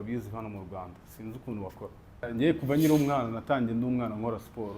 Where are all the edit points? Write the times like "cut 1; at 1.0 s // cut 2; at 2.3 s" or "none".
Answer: cut 1; at 2.3 s